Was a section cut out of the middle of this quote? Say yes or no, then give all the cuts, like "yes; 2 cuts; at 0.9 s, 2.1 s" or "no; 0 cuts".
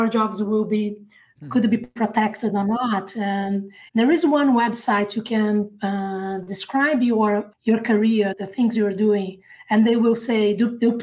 yes; 3 cuts; at 3.7 s, 7.5 s, 8.4 s